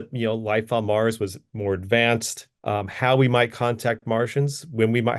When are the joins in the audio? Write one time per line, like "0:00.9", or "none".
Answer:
0:02.6